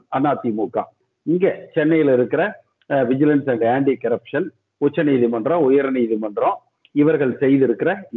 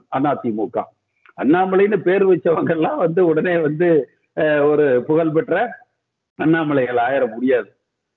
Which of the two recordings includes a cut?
first; 1 cut; at 1.1 s

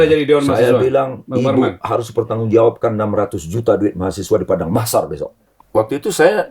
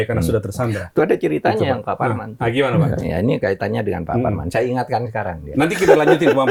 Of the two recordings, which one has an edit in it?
first; 1 cut; at 5.6 s

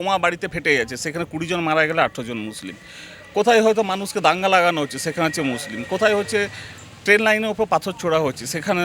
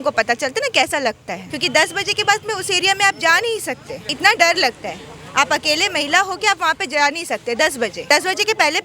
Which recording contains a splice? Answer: second; 3 cuts; at 1.5 s, 4.2 s, 8.0 s

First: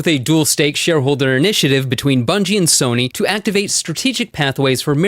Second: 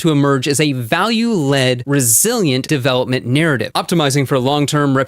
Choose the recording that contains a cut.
second; 1 cut; at 2.6 s

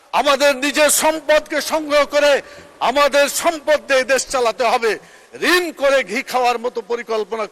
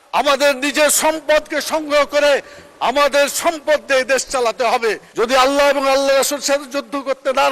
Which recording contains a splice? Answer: second; 1 cut; at 5.1 s

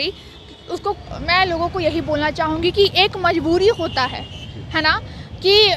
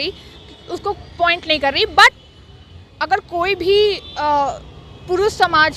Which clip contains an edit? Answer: first; 1 cut; at 1.1 s

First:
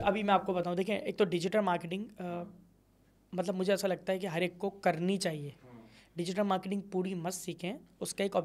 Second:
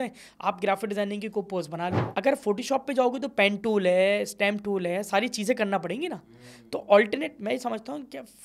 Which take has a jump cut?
second; 1 cut; at 2.0 s

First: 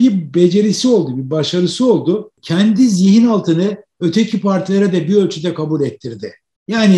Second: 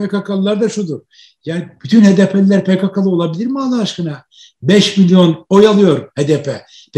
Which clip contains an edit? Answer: first; 1 cut; at 2.3 s

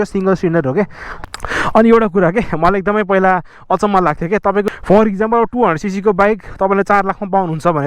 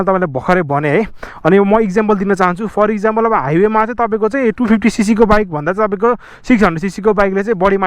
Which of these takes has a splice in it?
first; 2 cuts; at 1.0 s, 4.7 s

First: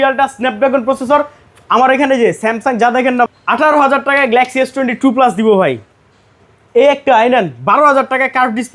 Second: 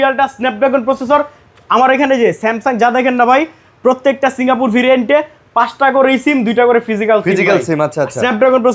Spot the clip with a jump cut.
first; 1 cut; at 3.3 s

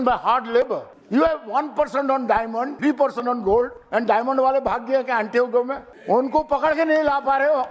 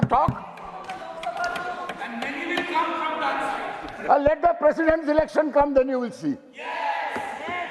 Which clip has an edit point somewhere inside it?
first; 4 cuts; at 0.9 s, 2.7 s, 3.8 s, 5.9 s

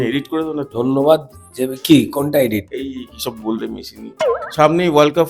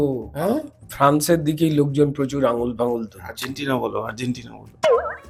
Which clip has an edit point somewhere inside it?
first; 1 cut; at 4.4 s

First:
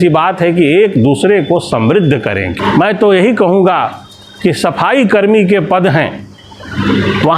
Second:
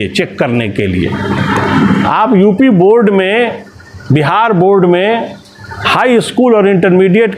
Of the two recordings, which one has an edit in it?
first; 1 cut; at 2.6 s

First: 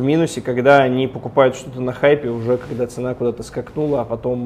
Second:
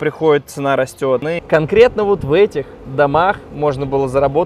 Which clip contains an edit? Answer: second; 1 cut; at 1.3 s

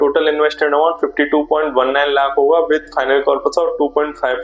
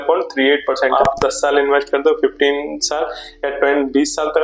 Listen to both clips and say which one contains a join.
second; 1 cut; at 0.9 s

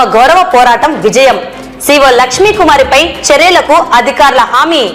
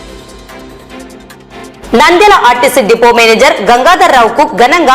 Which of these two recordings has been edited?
second; 1 cut; at 1.8 s

